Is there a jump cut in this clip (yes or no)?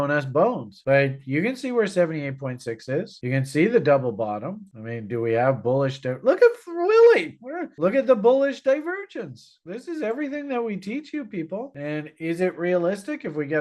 no